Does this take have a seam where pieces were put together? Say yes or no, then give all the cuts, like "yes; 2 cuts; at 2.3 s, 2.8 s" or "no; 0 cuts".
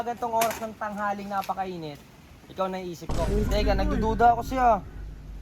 yes; 1 cut; at 3.3 s